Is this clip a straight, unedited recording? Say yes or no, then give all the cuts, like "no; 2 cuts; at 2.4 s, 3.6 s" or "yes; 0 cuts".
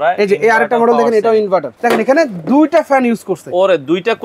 no; 1 cut; at 1.7 s